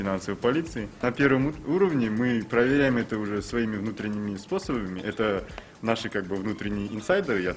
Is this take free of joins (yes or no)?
no